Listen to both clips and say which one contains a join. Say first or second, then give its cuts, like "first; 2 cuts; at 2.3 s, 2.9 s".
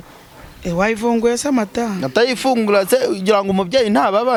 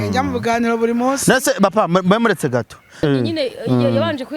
second; 1 cut; at 3.0 s